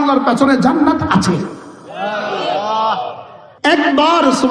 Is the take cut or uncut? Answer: uncut